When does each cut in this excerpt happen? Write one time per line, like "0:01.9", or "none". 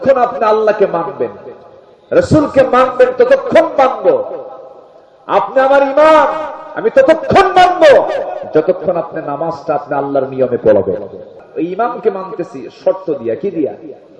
0:11.4